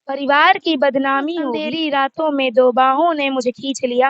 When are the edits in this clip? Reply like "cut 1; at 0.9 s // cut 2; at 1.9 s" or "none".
cut 1; at 1.7 s